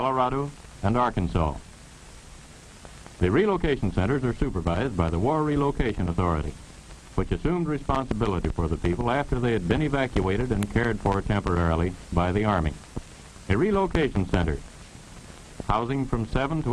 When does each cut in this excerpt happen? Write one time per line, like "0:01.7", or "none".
0:04.1